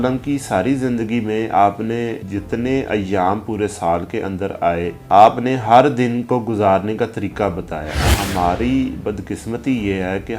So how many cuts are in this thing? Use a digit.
3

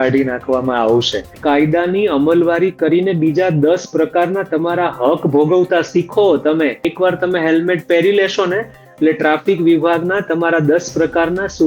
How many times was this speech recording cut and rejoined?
2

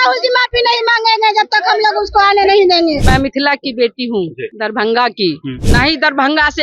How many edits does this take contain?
3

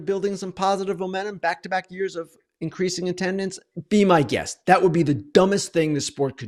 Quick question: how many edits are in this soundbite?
0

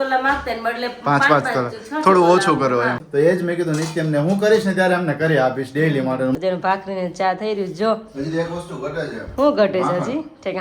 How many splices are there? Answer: 2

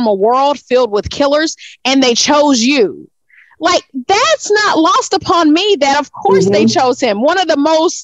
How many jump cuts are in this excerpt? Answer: 0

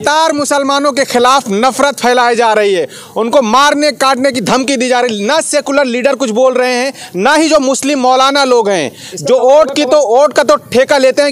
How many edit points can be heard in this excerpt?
0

